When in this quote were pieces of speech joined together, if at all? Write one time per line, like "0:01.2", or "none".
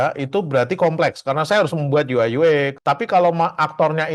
0:02.8